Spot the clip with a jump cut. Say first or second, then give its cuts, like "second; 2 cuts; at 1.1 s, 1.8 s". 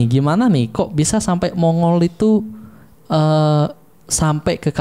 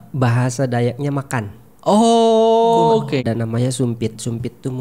second; 1 cut; at 3.3 s